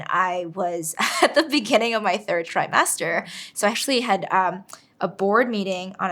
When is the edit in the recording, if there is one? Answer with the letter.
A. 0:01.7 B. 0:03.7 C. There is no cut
B